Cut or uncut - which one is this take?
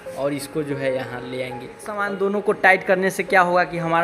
cut